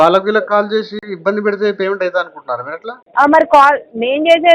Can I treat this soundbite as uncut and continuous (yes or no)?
no